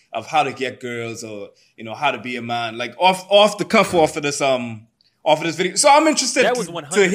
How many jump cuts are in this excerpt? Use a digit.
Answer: 0